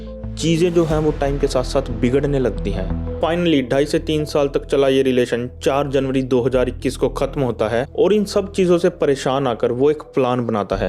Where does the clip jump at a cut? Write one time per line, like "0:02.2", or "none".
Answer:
0:03.1
0:07.9